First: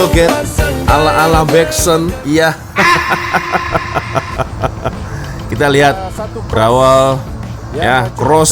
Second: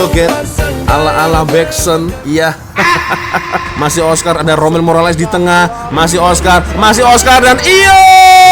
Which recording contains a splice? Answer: second; 1 cut; at 3.7 s

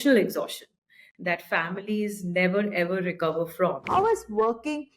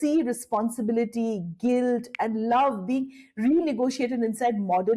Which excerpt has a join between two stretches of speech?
first; 1 cut; at 3.8 s

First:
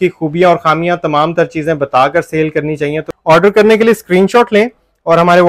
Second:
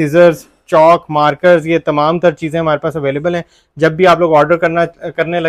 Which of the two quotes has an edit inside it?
first; 1 cut; at 3.1 s

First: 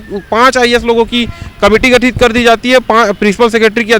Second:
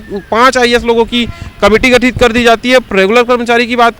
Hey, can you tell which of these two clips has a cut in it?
second; 1 cut; at 2.9 s

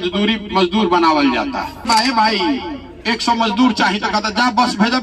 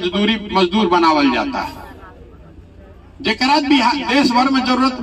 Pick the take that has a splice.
first; 1 cut; at 1.8 s

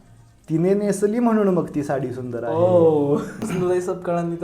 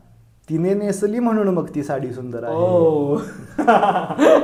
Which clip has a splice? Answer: first; 1 cut; at 3.4 s

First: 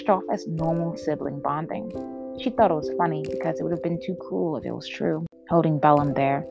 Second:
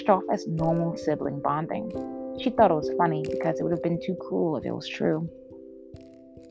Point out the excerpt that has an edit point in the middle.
first; 1 cut; at 5.3 s

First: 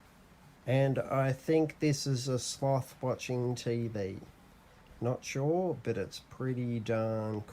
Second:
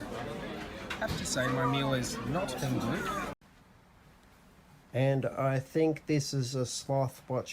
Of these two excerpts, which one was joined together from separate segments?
second; 1 cut; at 3.3 s

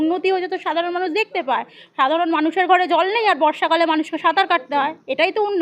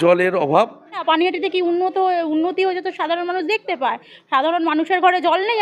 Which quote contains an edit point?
second; 1 cut; at 1.0 s

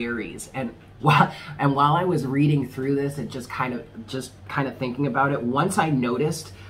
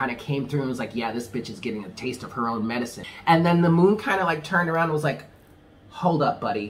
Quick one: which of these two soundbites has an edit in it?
second; 1 cut; at 3.0 s

